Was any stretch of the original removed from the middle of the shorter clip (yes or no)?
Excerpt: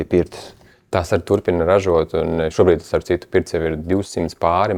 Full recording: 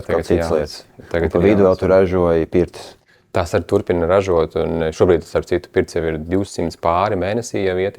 no